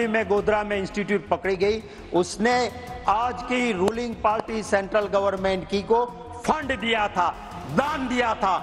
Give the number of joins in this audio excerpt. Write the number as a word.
zero